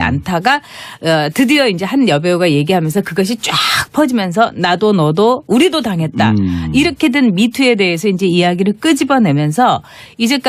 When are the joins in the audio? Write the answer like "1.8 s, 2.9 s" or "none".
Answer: 4.6 s